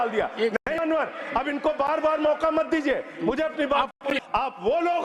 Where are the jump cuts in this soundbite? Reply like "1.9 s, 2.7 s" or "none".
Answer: 4.2 s